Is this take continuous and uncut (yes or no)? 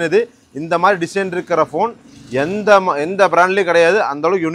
yes